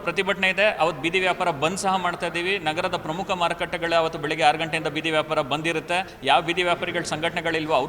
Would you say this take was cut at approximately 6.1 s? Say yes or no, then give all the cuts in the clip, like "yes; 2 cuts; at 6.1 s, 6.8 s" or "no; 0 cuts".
yes; 1 cut; at 6.1 s